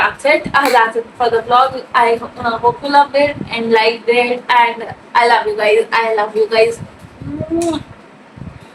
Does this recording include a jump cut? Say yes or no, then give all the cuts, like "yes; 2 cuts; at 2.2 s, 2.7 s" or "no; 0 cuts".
no; 0 cuts